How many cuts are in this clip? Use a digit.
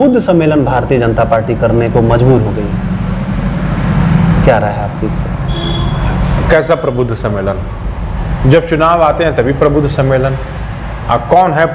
0